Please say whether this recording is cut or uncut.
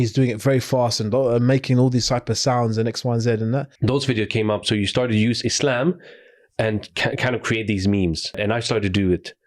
cut